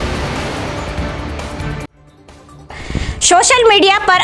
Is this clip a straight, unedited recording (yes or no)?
no